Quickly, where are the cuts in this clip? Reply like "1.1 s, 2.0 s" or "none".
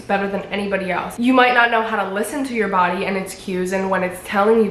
1.1 s